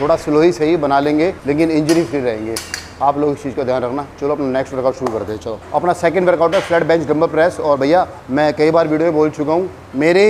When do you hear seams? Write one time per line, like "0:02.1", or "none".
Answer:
none